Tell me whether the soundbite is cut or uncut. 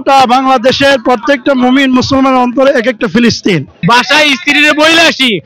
cut